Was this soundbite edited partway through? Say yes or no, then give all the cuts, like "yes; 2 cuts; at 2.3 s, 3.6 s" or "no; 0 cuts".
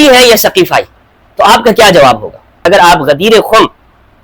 yes; 1 cut; at 2.6 s